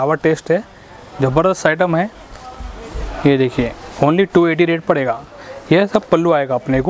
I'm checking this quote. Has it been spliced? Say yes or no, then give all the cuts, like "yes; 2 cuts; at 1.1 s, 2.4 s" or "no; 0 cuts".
no; 0 cuts